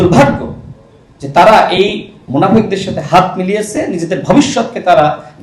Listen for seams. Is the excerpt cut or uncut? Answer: uncut